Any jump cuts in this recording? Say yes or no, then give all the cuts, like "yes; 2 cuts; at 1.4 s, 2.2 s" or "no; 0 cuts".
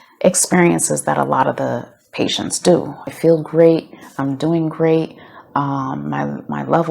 yes; 1 cut; at 3.0 s